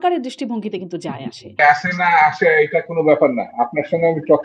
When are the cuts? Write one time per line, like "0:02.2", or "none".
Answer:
0:01.6